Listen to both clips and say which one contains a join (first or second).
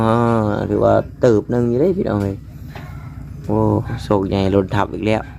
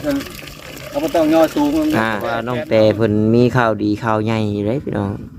second